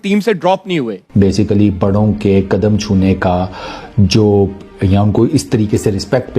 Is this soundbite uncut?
no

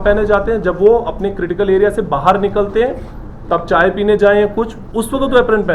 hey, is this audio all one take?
yes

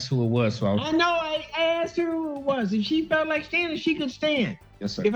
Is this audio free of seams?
yes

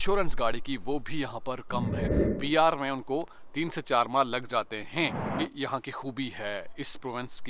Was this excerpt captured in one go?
no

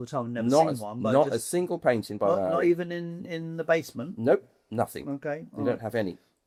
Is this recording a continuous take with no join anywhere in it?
yes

